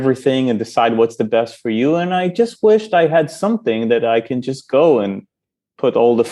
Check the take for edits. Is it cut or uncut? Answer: uncut